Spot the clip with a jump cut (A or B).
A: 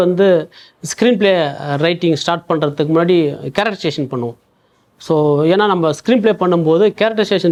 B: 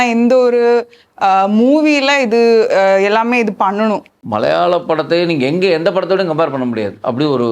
B